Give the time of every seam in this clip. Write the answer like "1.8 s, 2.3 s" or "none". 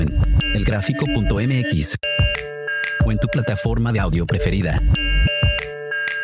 5.3 s